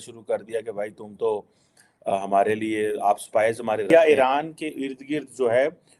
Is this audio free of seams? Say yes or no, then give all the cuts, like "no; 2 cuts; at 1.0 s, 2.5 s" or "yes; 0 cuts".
yes; 0 cuts